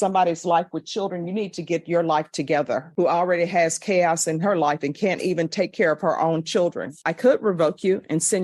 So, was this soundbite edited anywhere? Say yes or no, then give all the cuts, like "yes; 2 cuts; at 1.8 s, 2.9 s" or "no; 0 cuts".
yes; 2 cuts; at 2.9 s, 7.0 s